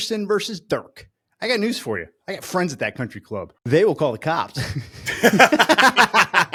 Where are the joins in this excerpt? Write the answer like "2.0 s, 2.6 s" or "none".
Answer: none

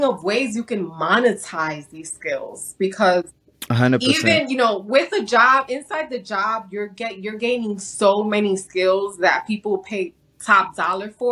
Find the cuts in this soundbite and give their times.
none

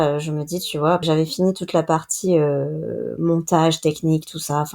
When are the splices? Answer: 1.0 s

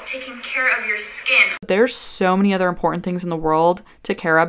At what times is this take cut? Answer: 1.5 s

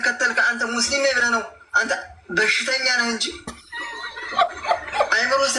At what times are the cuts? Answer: none

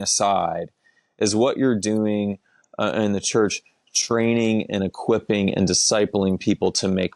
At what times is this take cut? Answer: none

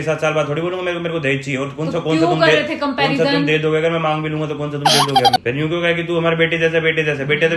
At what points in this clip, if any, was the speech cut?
5.4 s

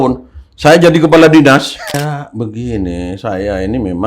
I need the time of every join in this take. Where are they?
2.0 s

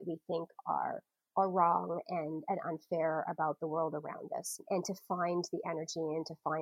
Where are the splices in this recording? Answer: 4.6 s

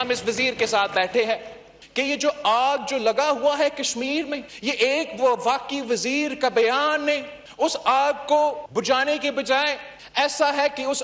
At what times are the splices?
1.7 s

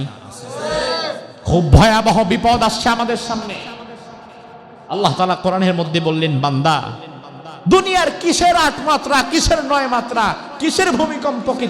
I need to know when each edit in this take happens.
1.3 s

